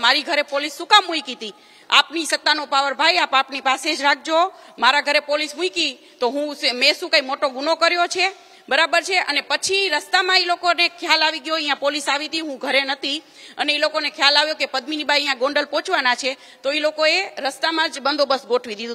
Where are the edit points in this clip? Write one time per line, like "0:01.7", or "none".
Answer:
none